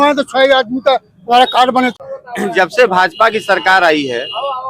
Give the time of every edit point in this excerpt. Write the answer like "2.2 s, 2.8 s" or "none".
1.9 s